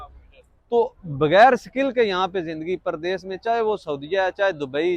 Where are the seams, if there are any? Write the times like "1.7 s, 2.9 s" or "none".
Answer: 1.0 s